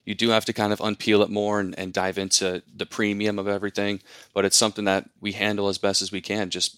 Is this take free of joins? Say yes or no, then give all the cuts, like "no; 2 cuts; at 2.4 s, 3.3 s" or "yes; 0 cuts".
no; 2 cuts; at 1.9 s, 5.1 s